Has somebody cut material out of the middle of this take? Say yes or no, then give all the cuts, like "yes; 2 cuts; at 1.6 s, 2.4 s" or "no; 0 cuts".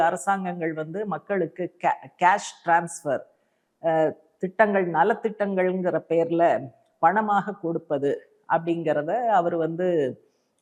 no; 0 cuts